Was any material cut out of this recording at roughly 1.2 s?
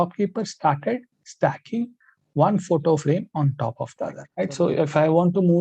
no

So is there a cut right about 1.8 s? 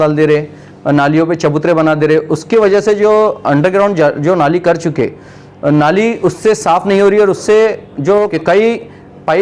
no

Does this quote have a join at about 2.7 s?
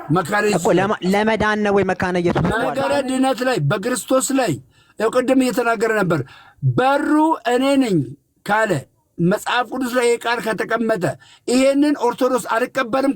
yes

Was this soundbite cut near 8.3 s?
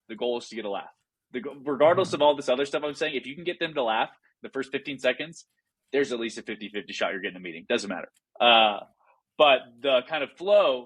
no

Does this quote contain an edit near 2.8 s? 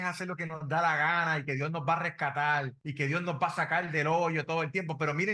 yes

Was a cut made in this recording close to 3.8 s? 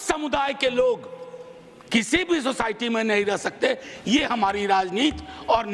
no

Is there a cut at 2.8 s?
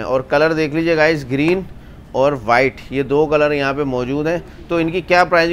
no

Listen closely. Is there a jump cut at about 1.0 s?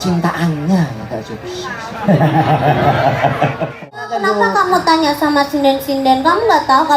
no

